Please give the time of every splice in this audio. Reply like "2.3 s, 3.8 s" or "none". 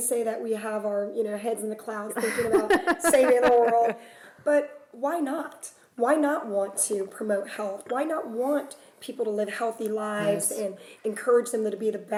none